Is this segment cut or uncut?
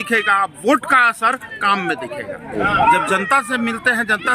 cut